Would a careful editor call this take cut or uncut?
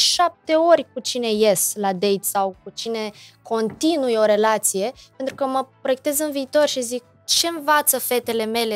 uncut